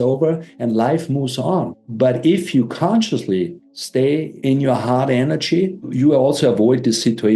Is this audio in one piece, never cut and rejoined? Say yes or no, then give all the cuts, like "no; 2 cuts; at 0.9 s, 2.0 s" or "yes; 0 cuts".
no; 3 cuts; at 1.8 s, 3.8 s, 5.9 s